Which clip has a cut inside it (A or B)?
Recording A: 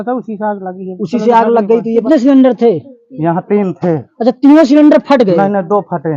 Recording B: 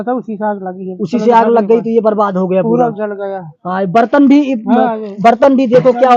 A